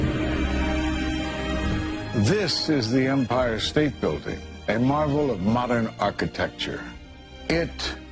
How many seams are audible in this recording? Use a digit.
1